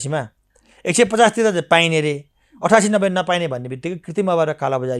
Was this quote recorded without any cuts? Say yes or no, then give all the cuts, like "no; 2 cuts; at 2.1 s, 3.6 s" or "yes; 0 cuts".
yes; 0 cuts